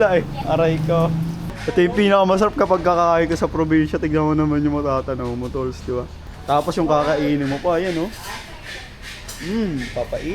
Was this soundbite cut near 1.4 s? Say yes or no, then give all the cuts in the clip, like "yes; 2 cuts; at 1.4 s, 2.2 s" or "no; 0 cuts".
yes; 2 cuts; at 1.4 s, 6.3 s